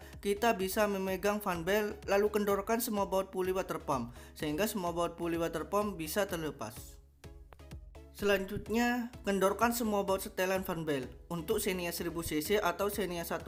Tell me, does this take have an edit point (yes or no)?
no